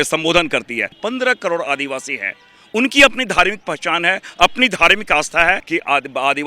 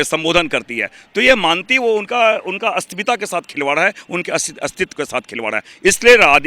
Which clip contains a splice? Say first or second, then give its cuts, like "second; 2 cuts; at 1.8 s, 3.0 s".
first; 2 cuts; at 0.9 s, 5.6 s